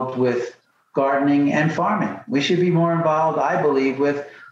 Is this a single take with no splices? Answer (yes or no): yes